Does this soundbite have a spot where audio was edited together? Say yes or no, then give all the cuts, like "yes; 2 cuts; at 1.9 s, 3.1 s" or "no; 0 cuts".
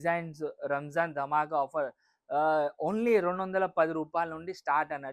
no; 0 cuts